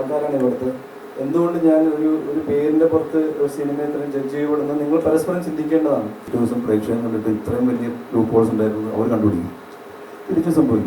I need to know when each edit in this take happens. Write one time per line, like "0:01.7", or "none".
0:06.2